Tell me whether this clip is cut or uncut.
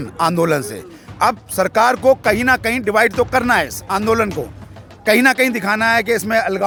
uncut